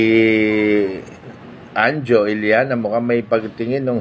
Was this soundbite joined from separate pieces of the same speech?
no; 0 cuts

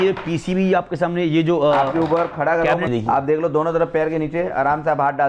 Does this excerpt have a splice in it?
yes; 1 cut; at 2.9 s

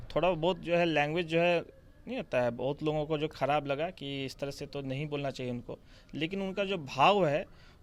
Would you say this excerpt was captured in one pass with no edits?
yes; 0 cuts

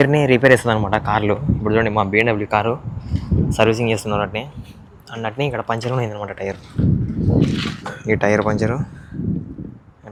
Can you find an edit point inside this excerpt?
no; 0 cuts

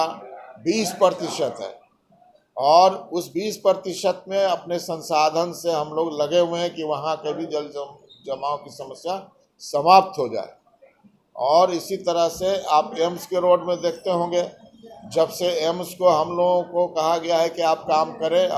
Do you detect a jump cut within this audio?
no; 0 cuts

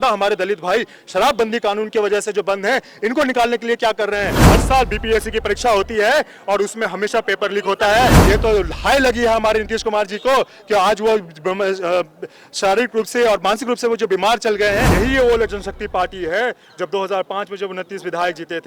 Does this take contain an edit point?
yes; 3 cuts; at 4.4 s, 8.2 s, 14.9 s

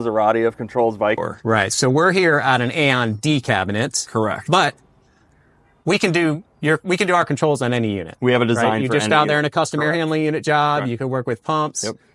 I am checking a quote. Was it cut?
yes; 1 cut; at 1.2 s

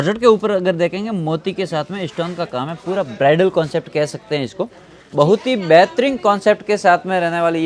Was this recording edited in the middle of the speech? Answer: no; 0 cuts

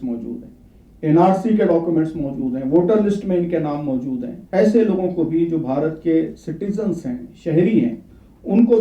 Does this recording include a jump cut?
yes; 1 cut; at 4.3 s

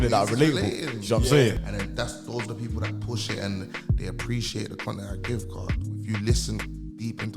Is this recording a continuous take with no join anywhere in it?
no; 1 cut; at 1.6 s

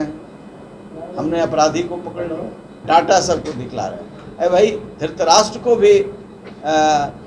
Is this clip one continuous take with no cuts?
no; 1 cut; at 2.8 s

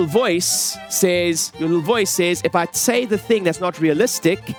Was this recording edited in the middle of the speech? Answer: no; 0 cuts

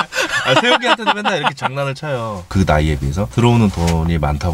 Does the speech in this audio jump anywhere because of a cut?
yes; 1 cut; at 2.4 s

